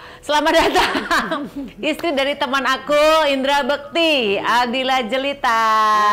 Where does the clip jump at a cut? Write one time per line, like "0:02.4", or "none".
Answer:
none